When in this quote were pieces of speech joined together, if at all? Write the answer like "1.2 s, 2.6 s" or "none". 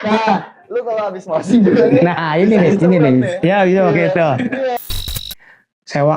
5.0 s